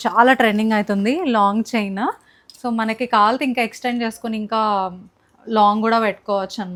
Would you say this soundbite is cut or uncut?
uncut